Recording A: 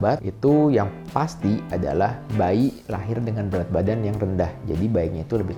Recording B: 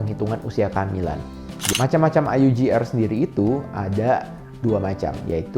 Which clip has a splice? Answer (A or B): B